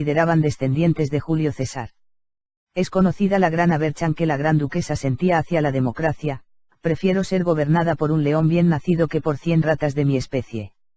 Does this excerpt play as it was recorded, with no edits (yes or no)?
yes